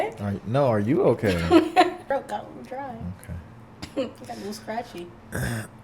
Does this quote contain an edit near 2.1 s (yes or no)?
yes